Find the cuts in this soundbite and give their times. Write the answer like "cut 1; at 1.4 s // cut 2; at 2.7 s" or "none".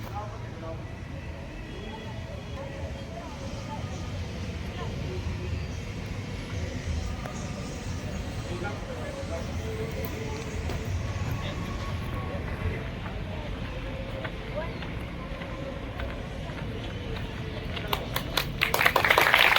cut 1; at 2.6 s

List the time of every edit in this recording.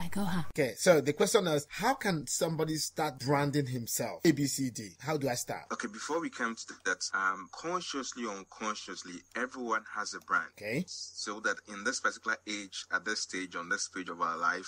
cut 1; at 4.2 s

